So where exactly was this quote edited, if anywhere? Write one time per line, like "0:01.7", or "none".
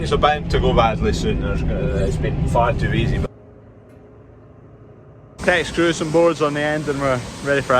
0:03.2
0:05.4